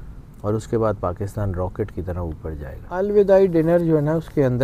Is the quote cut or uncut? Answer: cut